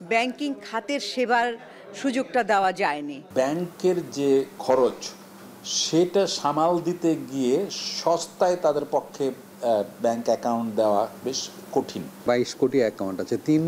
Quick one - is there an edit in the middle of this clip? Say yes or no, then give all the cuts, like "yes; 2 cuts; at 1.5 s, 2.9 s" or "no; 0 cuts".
yes; 3 cuts; at 3.2 s, 4.5 s, 12.2 s